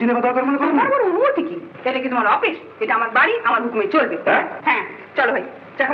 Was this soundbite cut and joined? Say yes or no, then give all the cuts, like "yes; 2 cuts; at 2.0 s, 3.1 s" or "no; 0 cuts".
no; 0 cuts